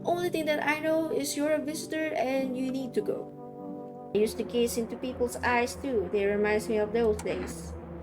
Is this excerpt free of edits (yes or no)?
no